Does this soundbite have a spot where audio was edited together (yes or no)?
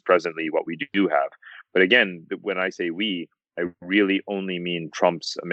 no